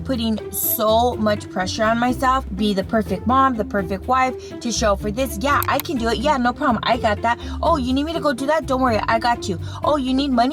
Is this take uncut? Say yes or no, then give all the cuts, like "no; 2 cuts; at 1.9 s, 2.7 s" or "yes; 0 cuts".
yes; 0 cuts